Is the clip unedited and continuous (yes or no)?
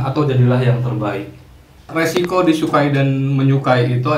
no